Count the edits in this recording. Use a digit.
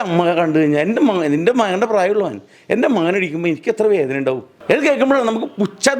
1